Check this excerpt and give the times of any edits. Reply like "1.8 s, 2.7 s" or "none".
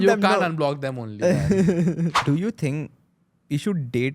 2.2 s